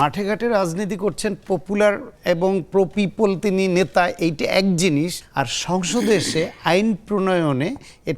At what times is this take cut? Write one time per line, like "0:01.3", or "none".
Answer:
0:02.1
0:05.2